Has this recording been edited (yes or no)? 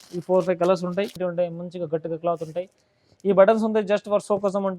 yes